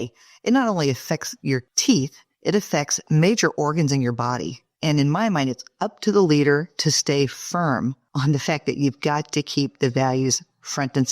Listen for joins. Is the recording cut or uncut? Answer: cut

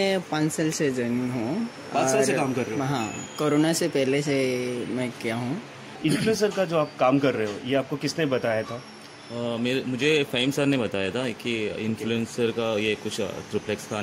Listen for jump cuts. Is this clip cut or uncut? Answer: cut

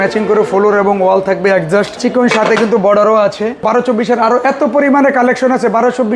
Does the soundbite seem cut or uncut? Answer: cut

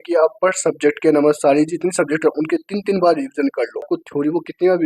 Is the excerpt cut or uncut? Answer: cut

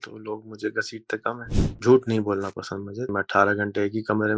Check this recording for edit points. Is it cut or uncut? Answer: cut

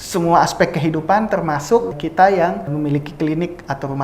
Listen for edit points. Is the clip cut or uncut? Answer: cut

